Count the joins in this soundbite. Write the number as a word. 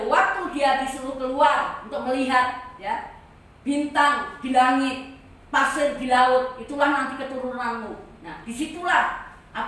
zero